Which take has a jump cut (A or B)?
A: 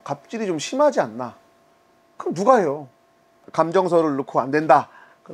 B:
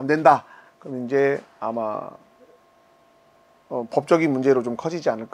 A